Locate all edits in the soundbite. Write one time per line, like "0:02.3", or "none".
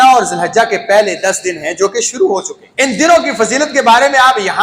0:02.6